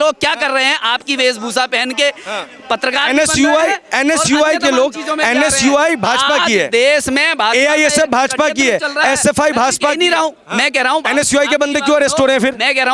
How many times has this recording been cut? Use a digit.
0